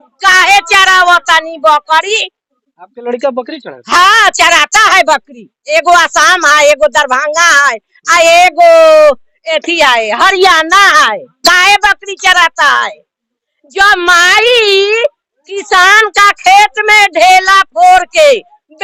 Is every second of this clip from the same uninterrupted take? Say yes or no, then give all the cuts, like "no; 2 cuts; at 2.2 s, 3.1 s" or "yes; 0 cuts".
yes; 0 cuts